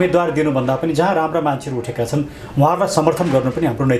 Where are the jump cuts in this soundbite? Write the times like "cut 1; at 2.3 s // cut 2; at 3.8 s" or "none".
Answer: none